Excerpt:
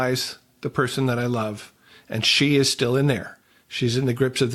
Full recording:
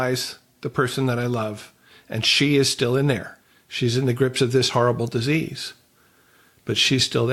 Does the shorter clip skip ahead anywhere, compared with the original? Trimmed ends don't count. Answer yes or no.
no